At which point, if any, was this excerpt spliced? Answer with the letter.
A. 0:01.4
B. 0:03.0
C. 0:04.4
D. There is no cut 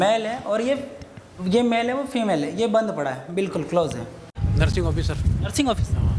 C